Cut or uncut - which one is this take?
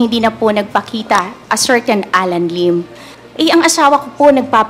cut